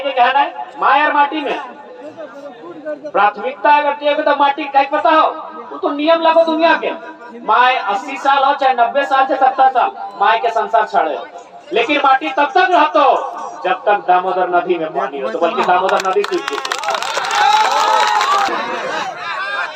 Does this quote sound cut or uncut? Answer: cut